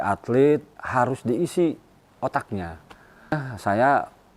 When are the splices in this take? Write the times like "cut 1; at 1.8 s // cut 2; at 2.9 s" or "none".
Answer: cut 1; at 3.4 s